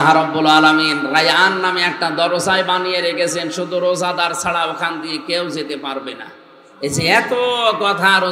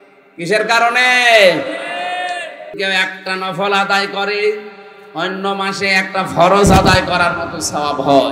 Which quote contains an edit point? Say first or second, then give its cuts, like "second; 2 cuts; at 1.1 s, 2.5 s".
second; 1 cut; at 2.8 s